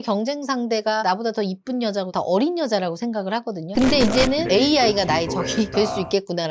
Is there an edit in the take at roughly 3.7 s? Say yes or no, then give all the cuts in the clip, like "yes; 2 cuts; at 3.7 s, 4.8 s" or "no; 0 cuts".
yes; 1 cut; at 3.7 s